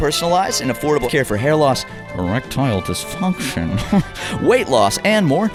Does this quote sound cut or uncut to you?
uncut